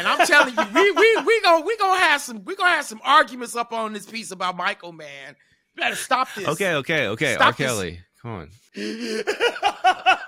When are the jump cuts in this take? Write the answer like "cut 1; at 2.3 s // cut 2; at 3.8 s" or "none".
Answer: cut 1; at 8.6 s